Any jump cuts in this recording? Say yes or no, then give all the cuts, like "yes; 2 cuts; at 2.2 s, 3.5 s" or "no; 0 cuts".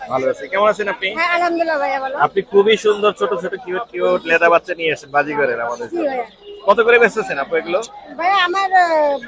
no; 0 cuts